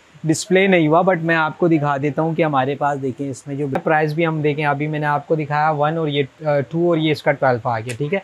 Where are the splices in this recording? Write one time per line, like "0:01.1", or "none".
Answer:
0:03.8